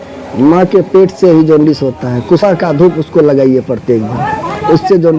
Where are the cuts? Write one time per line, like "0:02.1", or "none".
0:02.4